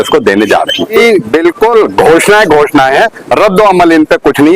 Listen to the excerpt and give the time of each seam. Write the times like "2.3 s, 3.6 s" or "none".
1.0 s